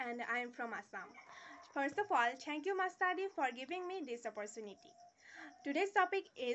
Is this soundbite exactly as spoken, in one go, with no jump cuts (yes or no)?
yes